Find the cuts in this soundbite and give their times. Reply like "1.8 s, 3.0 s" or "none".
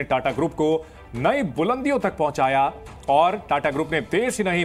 none